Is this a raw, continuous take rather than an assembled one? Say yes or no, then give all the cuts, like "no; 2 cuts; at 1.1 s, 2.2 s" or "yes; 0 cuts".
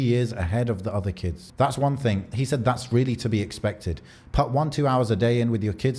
no; 2 cuts; at 1.4 s, 2.2 s